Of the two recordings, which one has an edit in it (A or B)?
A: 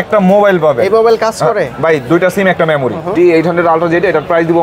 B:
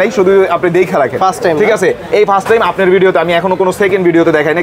A